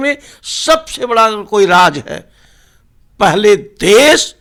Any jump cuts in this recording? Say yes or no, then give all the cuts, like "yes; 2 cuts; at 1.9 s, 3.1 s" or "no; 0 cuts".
no; 0 cuts